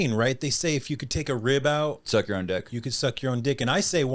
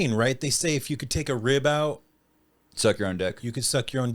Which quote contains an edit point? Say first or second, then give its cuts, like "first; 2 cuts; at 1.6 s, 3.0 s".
first; 1 cut; at 2.0 s